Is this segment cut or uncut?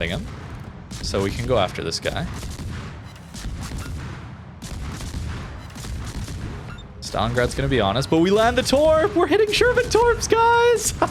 uncut